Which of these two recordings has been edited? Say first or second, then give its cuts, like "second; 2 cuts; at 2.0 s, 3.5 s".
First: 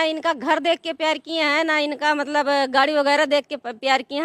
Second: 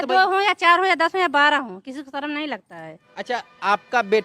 second; 1 cut; at 3.0 s